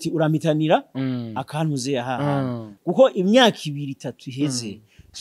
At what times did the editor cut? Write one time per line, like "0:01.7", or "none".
0:02.7